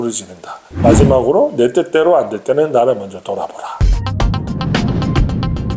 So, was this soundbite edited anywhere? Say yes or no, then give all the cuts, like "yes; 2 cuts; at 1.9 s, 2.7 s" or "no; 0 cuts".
yes; 1 cut; at 3.8 s